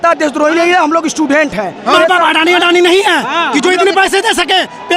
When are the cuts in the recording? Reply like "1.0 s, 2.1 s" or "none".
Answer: 1.9 s